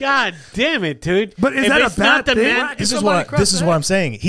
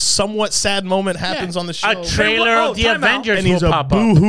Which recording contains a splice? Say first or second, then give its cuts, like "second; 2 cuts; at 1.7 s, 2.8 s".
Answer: first; 1 cut; at 2.7 s